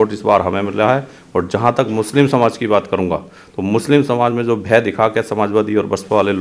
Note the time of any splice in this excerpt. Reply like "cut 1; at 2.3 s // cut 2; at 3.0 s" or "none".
none